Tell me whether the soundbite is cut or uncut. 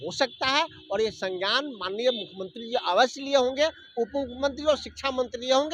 uncut